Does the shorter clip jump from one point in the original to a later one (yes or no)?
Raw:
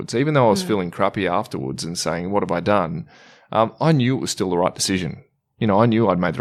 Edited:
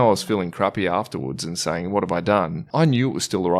yes